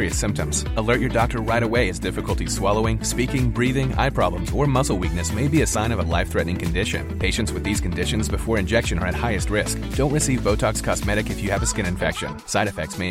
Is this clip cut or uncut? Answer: uncut